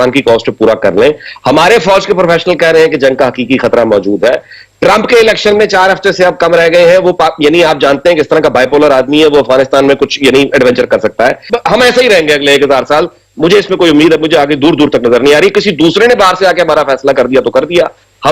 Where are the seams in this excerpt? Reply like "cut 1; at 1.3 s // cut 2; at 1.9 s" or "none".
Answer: cut 1; at 11.5 s